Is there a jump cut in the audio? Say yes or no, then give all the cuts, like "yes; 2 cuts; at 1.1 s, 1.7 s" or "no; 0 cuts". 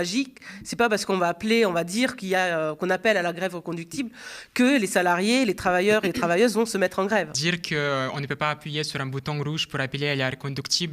yes; 1 cut; at 7.3 s